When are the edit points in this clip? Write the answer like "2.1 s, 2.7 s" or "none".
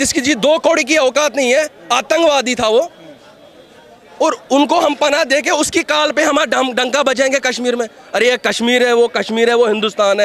none